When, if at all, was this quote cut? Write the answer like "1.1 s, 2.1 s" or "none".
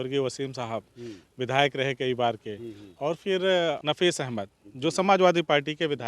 3.8 s